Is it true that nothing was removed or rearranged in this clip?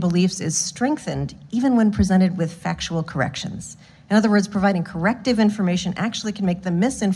yes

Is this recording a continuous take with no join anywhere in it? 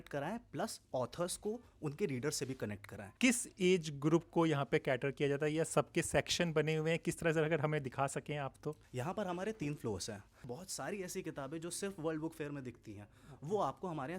no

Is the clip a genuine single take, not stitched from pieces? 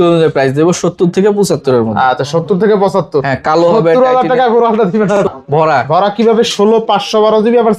no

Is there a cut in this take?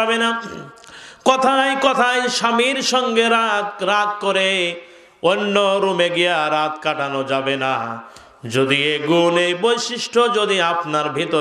no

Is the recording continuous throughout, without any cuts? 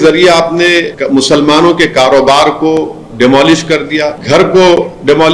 no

